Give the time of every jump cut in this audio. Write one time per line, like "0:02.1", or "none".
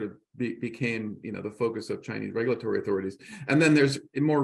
none